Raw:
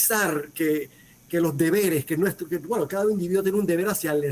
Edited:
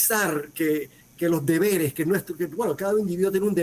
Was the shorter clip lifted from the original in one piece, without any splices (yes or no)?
no